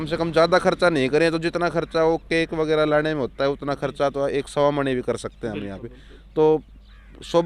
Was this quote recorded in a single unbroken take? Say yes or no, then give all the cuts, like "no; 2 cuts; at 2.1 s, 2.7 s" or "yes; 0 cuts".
yes; 0 cuts